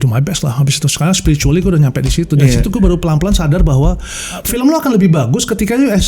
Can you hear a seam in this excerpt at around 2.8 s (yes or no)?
no